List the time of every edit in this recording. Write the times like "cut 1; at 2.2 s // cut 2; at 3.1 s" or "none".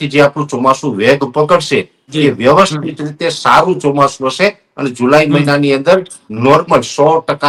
none